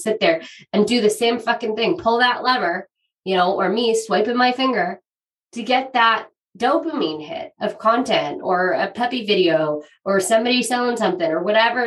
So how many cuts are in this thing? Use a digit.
0